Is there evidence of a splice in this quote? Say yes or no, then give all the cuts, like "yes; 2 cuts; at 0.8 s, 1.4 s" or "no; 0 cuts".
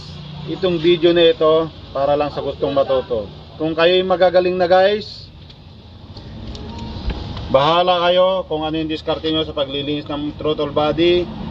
no; 0 cuts